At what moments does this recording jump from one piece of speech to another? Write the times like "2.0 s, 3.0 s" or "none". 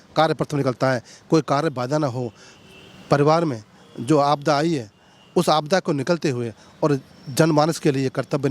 none